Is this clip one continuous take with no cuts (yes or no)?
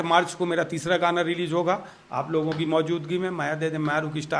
yes